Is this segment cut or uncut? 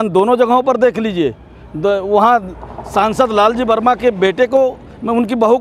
uncut